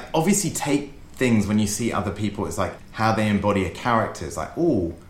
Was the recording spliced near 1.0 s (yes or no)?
no